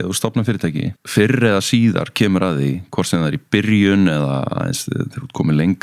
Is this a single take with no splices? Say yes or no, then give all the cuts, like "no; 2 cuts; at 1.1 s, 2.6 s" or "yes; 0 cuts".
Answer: no; 1 cut; at 1.0 s